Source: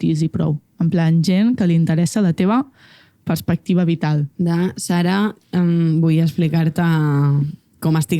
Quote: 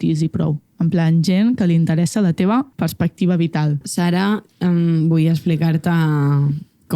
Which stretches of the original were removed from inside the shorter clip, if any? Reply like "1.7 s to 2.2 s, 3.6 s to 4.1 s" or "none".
2.7 s to 3.2 s, 4.3 s to 4.8 s

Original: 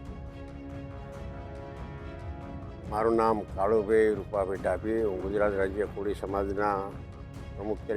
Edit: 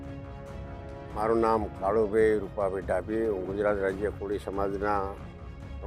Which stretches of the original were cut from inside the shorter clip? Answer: 1.8 s to 2.9 s

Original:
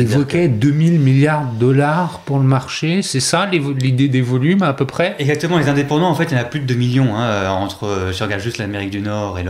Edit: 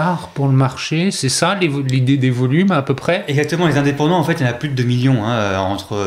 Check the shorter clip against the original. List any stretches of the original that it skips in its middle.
none

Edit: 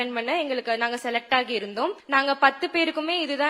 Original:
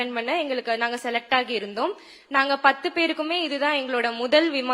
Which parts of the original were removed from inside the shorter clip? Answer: 2.0 s to 2.2 s

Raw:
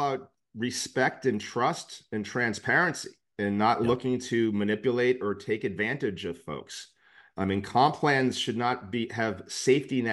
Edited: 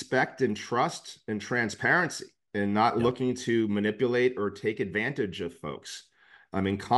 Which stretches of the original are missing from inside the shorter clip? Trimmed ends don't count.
none

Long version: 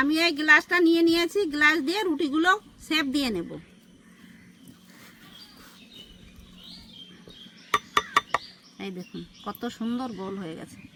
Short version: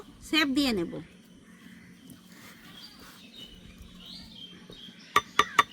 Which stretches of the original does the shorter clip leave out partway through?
none

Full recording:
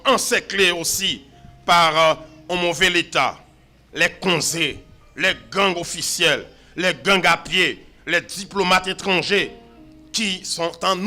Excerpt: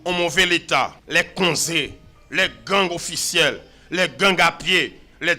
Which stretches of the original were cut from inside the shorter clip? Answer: 3.4 s to 3.9 s

